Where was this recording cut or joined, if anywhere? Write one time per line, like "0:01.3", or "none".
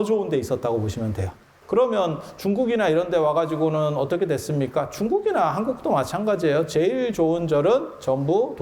0:01.5